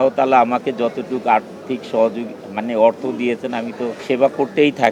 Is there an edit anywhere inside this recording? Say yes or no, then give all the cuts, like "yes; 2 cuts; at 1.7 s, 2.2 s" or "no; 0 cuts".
yes; 1 cut; at 4.0 s